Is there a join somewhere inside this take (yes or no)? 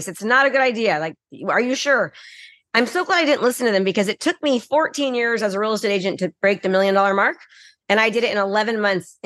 no